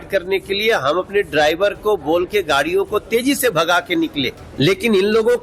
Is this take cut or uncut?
cut